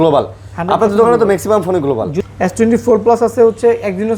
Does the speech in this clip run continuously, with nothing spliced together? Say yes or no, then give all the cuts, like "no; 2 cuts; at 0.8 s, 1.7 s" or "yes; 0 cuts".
no; 1 cut; at 2.2 s